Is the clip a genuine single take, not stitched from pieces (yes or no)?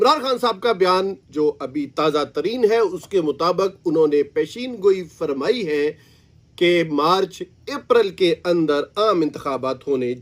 yes